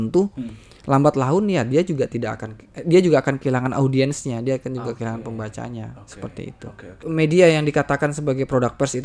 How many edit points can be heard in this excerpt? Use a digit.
1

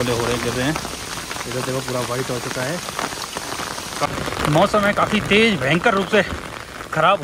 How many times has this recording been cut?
1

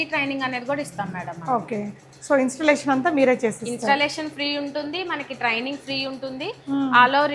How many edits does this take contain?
0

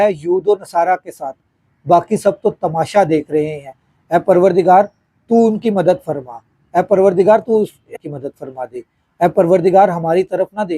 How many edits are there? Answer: 1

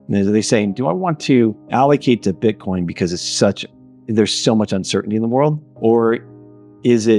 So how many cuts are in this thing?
2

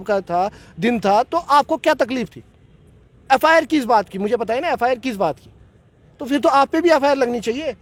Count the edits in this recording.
0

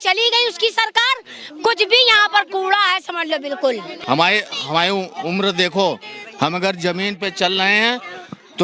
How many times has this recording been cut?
0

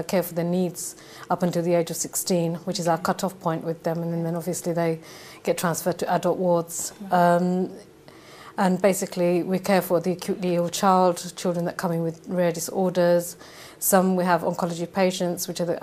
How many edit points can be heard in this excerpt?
1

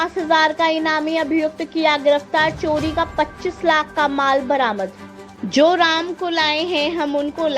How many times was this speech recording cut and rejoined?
1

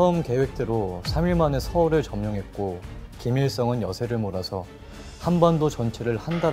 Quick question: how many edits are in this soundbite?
0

